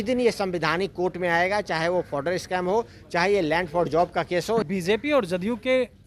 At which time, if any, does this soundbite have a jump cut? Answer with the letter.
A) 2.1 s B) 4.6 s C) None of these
B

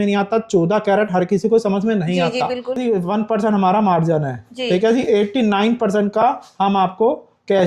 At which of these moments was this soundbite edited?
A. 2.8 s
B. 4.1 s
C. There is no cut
A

